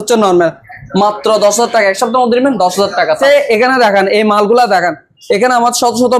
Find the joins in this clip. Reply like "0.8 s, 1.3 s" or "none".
3.2 s